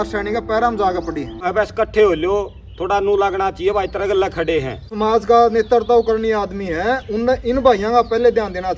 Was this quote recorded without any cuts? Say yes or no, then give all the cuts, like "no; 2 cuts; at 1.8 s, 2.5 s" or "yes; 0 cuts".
no; 2 cuts; at 1.5 s, 4.9 s